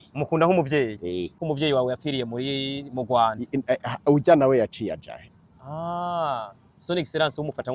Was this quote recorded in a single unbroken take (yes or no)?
no